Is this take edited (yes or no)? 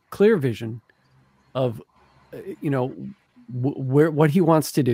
yes